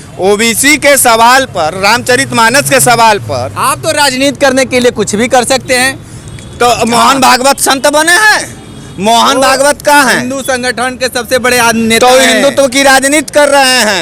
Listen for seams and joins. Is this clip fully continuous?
yes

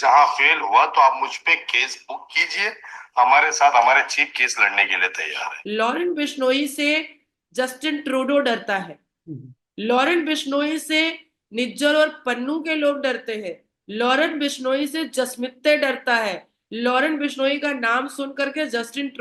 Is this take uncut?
no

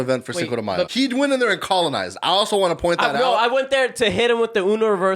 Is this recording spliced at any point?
yes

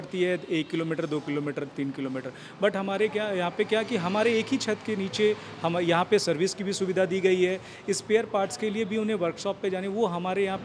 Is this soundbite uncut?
yes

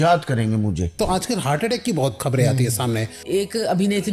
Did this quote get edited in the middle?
yes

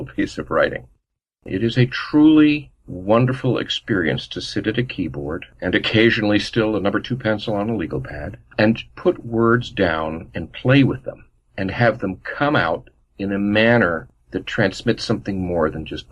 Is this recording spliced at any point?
yes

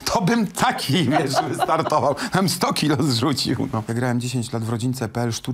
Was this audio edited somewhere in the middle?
yes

